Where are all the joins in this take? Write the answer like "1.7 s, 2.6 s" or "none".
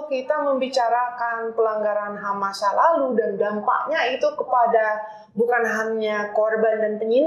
none